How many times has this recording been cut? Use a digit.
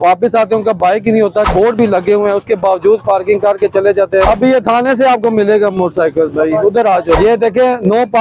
3